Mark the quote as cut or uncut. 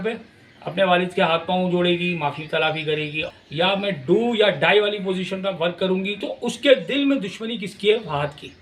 cut